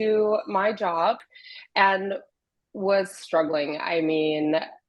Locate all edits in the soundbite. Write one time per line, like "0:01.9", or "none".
0:01.2